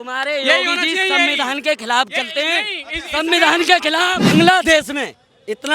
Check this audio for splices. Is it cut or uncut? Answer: cut